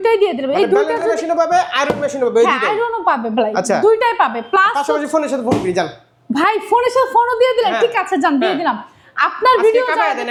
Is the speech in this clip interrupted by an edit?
no; 0 cuts

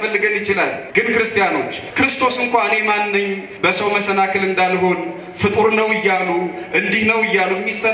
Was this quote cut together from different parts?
yes; 3 cuts; at 0.8 s, 1.8 s, 3.5 s

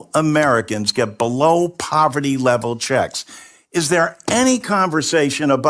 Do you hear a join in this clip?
no; 0 cuts

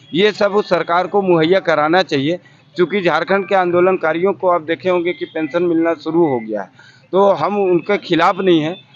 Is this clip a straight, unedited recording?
yes; 0 cuts

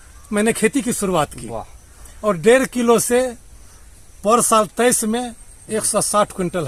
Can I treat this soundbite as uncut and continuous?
yes; 0 cuts

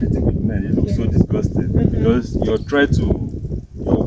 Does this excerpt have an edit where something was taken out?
no; 0 cuts

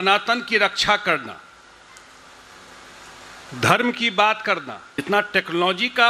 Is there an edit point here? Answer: yes; 1 cut; at 5.0 s

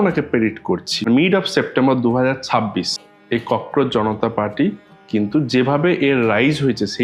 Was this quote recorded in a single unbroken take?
no; 2 cuts; at 0.9 s, 3.0 s

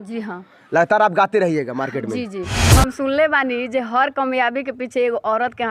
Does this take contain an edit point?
yes; 1 cut; at 2.5 s

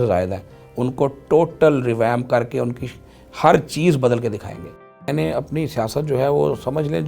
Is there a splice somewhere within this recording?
yes; 1 cut; at 5.1 s

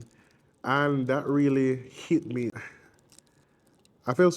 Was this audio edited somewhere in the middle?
yes; 1 cut; at 2.5 s

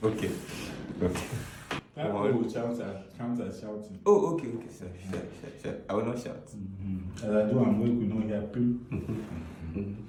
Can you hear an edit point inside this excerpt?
no; 0 cuts

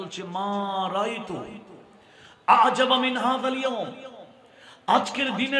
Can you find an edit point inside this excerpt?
no; 0 cuts

